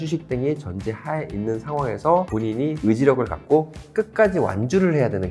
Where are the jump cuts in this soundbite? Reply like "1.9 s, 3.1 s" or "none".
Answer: 2.3 s